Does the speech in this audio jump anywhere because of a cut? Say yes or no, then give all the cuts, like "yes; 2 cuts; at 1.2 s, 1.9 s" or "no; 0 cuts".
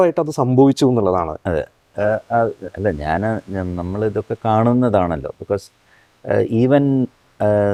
no; 0 cuts